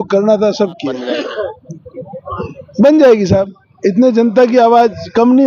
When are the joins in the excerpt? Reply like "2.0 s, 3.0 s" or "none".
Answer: 0.9 s